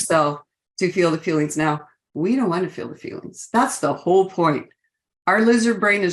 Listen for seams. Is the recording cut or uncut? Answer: uncut